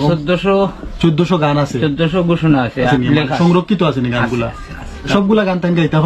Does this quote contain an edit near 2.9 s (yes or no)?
yes